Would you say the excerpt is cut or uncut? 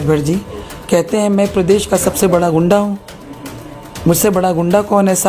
uncut